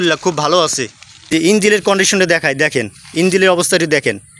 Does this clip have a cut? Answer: yes; 1 cut; at 1.5 s

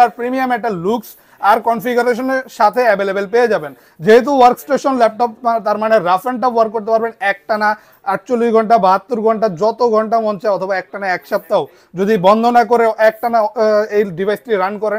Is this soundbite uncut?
yes; 0 cuts

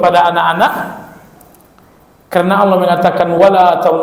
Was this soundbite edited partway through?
no; 0 cuts

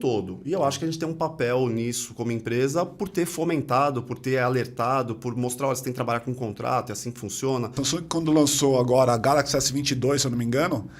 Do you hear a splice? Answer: yes; 1 cut; at 7.8 s

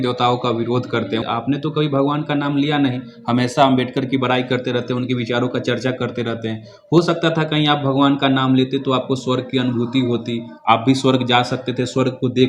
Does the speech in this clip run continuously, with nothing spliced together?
yes; 0 cuts

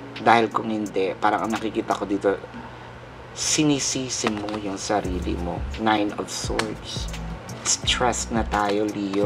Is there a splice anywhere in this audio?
no; 0 cuts

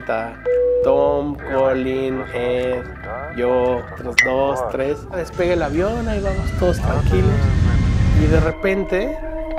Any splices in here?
no; 0 cuts

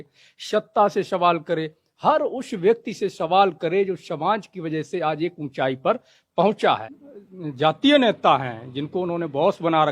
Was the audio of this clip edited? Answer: yes; 1 cut; at 6.9 s

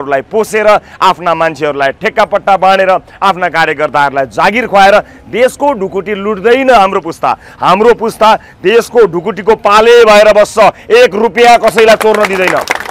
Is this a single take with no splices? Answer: yes; 0 cuts

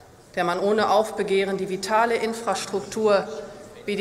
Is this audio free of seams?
yes; 0 cuts

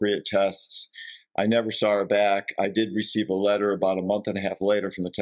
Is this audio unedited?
yes; 0 cuts

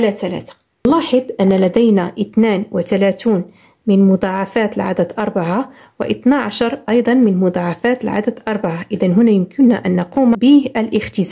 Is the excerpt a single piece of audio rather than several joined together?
no; 2 cuts; at 0.8 s, 10.4 s

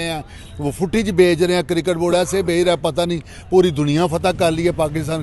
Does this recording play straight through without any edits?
yes; 0 cuts

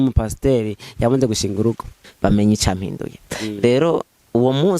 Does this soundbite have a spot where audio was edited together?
yes; 1 cut; at 2.0 s

